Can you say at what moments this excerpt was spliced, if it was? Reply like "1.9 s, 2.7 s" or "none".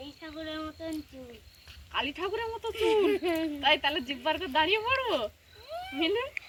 none